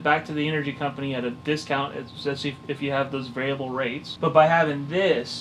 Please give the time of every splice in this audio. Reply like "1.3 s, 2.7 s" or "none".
4.1 s